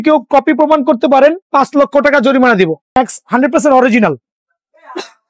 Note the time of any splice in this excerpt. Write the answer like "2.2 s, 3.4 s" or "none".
3.0 s